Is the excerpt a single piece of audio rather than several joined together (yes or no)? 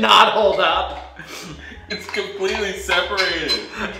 yes